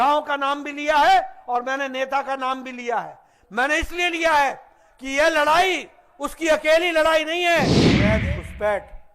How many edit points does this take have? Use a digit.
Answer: 1